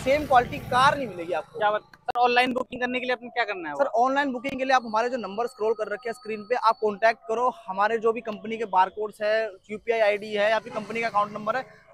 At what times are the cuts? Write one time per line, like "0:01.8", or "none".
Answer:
none